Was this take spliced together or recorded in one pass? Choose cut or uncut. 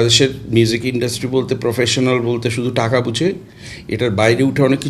uncut